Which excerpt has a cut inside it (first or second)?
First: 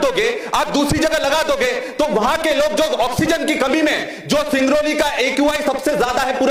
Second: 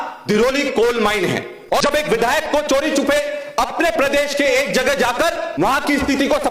second